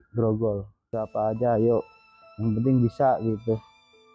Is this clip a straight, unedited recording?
no; 1 cut; at 1.0 s

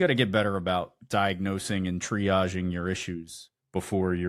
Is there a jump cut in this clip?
no; 0 cuts

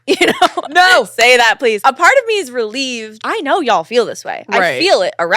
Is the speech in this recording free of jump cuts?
no; 2 cuts; at 1.8 s, 3.1 s

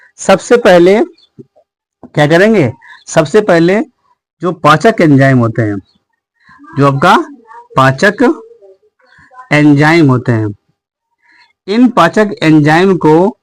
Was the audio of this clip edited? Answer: no; 0 cuts

